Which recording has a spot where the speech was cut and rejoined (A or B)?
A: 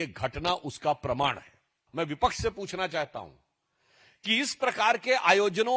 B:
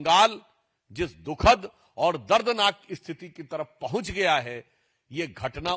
A